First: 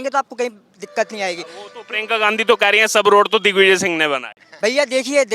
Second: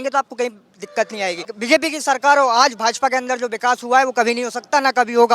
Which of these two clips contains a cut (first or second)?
second